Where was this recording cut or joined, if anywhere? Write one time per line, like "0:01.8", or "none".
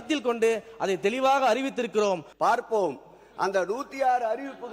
0:02.3